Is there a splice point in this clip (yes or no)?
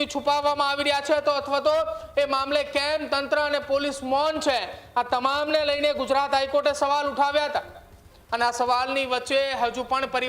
no